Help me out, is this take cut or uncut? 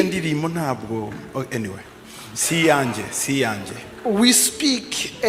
uncut